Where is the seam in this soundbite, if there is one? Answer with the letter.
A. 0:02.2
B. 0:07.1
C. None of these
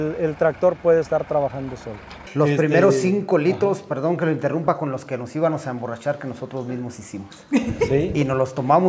A